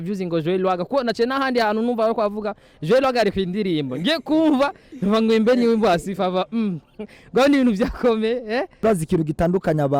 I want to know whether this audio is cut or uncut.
cut